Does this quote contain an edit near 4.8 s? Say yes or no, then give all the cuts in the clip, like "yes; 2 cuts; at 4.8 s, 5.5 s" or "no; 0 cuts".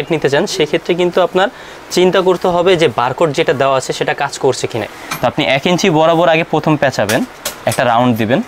yes; 1 cut; at 4.8 s